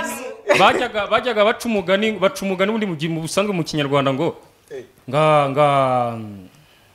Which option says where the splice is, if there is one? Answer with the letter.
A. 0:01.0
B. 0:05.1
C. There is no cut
C